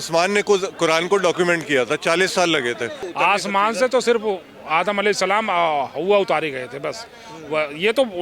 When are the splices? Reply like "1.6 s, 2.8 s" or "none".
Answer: 3.0 s